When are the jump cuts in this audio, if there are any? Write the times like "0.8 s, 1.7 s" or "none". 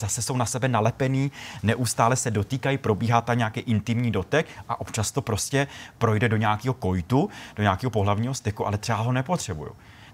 none